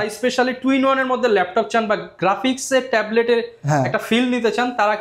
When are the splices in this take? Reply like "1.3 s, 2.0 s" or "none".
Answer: none